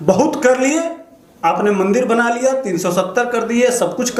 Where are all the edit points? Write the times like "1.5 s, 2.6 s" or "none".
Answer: none